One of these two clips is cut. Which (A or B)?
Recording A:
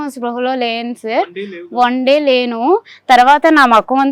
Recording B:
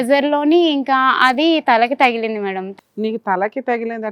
B